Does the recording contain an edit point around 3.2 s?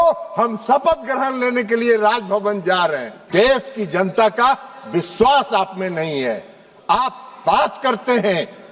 yes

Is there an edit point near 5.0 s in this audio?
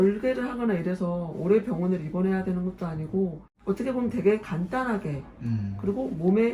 no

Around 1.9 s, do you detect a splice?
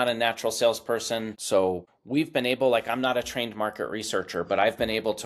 yes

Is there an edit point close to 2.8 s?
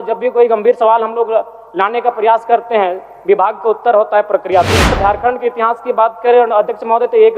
no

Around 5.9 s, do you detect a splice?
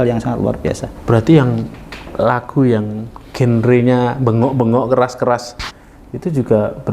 no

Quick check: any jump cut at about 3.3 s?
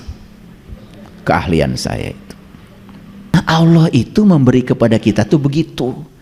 yes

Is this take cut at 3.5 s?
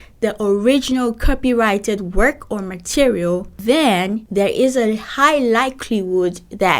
yes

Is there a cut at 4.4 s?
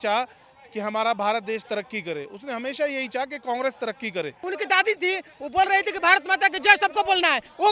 yes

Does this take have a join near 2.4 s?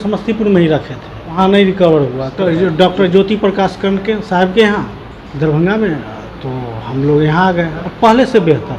yes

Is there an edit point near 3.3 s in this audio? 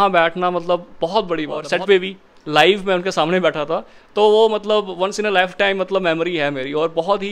no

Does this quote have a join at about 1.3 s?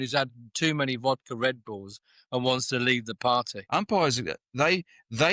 no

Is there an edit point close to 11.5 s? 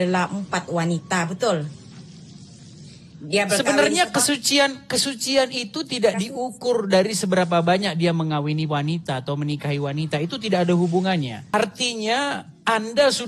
yes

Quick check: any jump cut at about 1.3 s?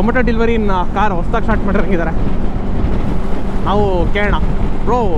no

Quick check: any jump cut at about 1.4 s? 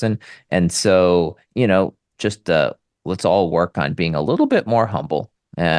no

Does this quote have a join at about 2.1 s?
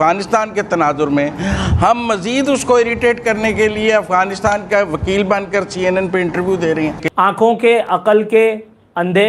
no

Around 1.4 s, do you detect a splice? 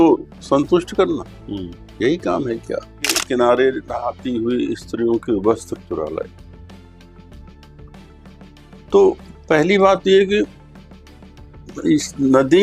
no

